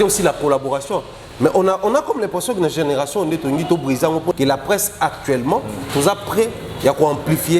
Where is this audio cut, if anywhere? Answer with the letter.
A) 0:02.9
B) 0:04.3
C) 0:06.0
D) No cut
B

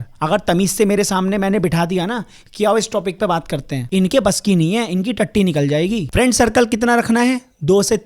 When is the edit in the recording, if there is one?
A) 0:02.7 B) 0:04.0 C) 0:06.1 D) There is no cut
C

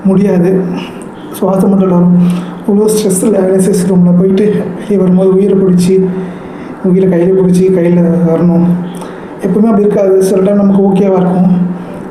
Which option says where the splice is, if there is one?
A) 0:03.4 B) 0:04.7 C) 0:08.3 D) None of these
A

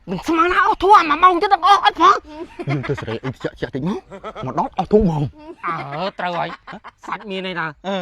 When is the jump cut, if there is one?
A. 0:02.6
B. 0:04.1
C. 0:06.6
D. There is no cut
A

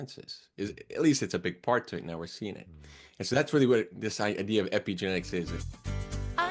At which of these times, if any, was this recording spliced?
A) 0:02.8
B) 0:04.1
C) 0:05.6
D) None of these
C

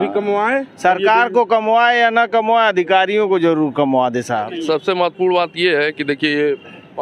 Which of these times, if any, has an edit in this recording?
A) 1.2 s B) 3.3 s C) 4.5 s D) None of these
C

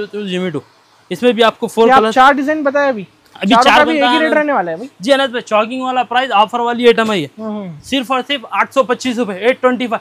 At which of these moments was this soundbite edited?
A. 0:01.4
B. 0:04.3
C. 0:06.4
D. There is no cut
D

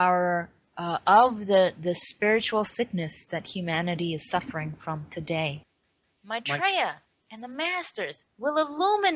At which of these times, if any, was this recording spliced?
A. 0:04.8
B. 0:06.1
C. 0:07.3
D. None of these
B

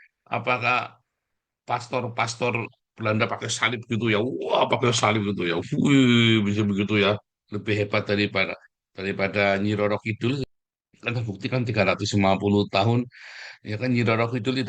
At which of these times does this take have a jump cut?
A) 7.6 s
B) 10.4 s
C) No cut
B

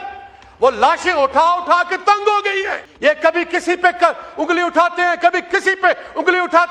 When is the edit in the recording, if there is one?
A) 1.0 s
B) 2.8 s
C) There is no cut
B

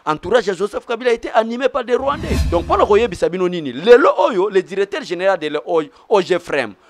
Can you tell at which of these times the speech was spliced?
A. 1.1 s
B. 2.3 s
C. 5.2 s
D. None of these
B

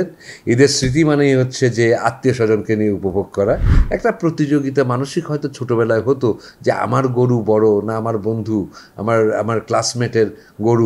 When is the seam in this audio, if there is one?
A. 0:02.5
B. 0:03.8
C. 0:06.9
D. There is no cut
B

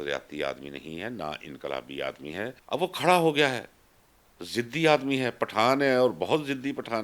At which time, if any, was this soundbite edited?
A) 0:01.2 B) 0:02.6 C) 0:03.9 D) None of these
B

